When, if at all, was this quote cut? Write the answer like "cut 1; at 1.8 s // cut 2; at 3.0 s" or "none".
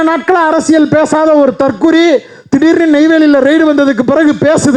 none